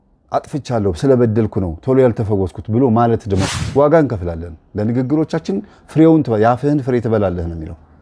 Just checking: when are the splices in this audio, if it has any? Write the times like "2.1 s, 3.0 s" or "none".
3.5 s

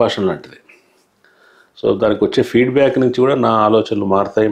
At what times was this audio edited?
none

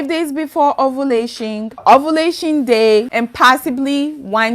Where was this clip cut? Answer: 1.8 s, 3.1 s

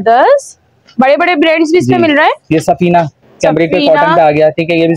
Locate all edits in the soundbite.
none

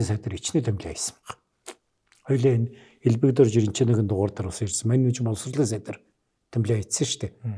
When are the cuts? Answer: none

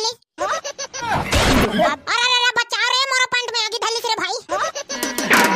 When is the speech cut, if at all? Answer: 1.1 s, 2.0 s

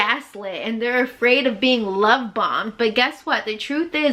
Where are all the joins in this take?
none

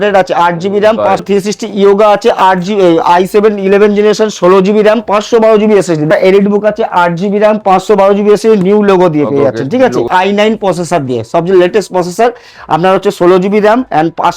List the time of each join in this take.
1.2 s, 6.1 s, 10.1 s

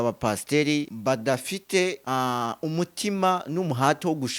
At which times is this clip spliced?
0.9 s, 2.0 s

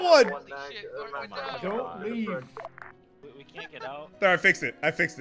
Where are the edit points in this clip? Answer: 3.3 s

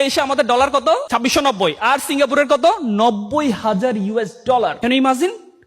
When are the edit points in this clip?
1.0 s, 4.8 s

